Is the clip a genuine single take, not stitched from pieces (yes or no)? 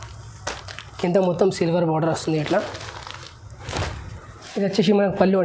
yes